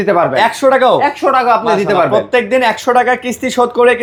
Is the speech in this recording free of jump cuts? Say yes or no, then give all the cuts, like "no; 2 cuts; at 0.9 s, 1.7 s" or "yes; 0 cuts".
yes; 0 cuts